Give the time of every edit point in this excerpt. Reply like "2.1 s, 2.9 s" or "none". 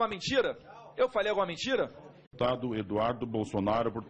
none